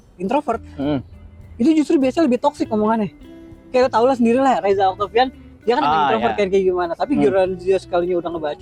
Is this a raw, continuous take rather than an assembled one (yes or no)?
yes